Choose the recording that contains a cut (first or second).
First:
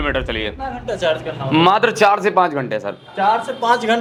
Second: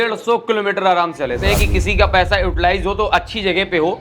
second